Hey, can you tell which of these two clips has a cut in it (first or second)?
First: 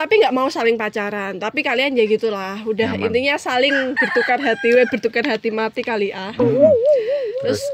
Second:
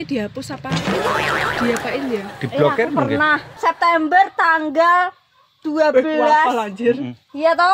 second